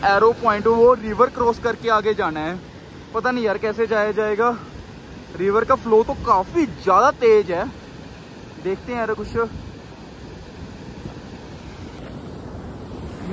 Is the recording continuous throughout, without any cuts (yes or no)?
yes